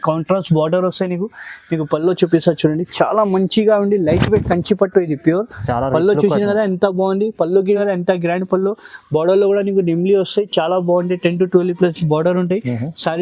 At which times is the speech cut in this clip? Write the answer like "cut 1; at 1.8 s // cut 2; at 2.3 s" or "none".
cut 1; at 7.8 s